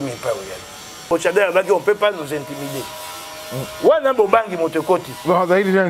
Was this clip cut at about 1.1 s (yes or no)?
yes